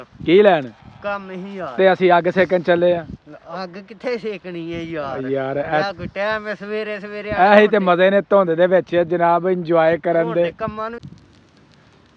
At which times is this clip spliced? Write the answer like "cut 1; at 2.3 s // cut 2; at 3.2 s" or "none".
cut 1; at 11.0 s